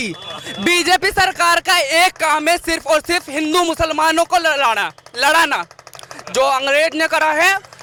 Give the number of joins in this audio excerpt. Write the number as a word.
zero